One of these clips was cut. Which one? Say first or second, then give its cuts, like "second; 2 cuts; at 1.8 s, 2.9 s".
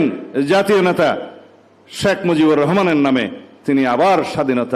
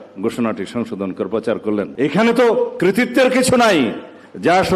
second; 1 cut; at 1.9 s